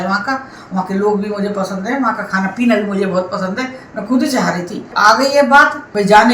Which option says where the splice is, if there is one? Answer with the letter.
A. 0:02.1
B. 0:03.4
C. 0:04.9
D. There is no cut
C